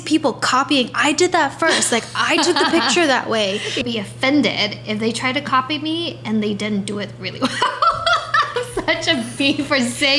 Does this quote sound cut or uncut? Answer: cut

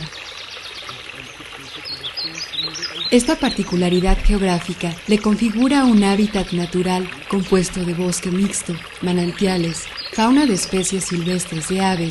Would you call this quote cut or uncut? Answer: uncut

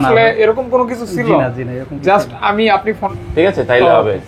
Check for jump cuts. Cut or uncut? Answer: cut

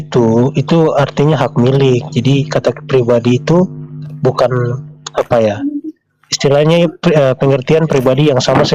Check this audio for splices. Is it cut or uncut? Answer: uncut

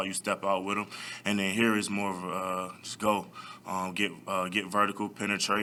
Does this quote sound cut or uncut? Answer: uncut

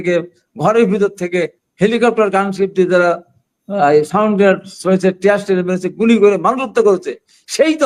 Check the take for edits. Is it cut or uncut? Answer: uncut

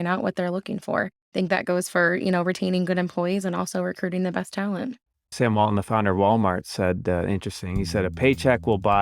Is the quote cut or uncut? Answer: cut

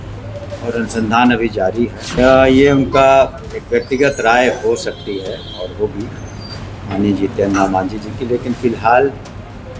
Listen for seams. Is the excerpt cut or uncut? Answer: cut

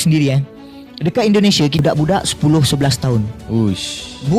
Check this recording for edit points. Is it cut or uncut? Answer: cut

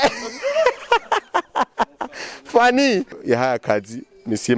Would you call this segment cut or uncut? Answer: cut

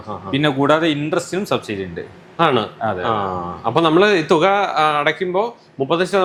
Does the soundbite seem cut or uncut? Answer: uncut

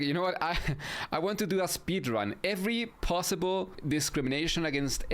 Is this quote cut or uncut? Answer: cut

